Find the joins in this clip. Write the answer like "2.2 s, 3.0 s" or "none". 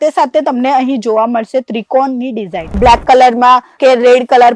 2.8 s